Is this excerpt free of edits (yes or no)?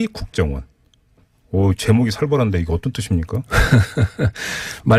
yes